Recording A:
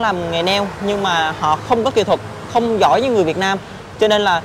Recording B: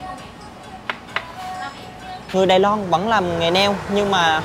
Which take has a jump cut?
B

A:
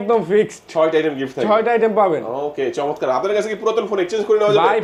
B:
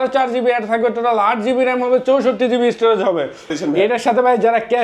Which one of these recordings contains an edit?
B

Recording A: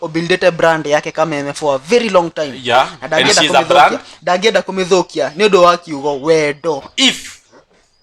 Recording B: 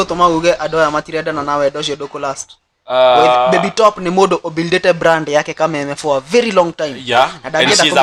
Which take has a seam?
A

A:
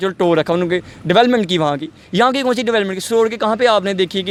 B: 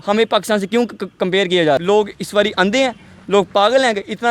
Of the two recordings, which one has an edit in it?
B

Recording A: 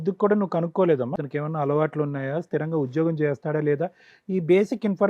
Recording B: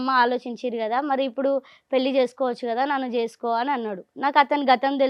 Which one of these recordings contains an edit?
A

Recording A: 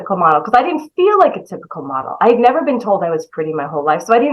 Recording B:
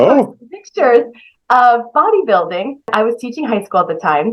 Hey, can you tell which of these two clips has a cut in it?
B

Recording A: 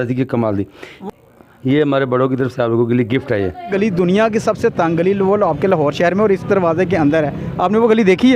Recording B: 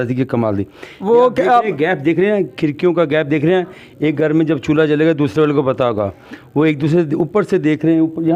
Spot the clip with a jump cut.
A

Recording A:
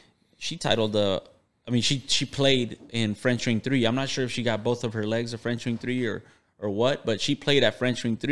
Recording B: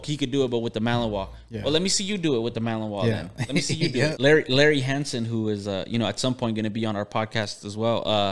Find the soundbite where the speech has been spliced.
B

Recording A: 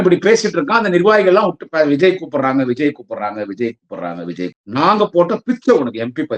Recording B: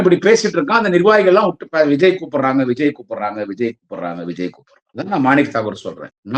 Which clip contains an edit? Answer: A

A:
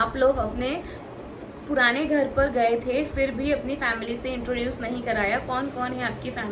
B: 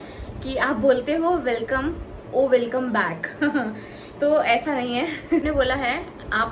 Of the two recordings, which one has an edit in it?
B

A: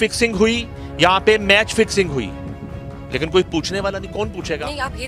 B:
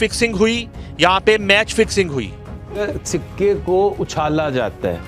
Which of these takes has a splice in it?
B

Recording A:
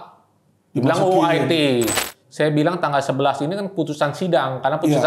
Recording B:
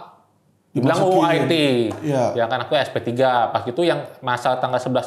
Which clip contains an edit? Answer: A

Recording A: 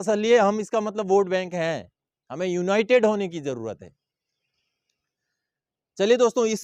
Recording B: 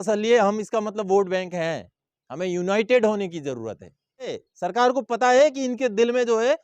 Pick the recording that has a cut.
B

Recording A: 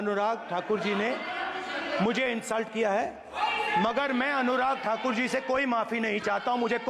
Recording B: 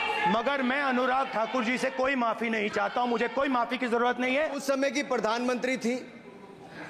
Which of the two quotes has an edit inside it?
B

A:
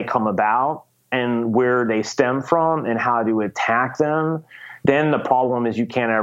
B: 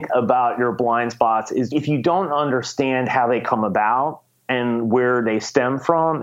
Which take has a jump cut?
B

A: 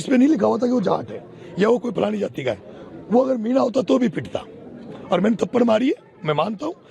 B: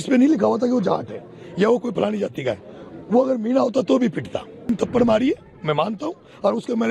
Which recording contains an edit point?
B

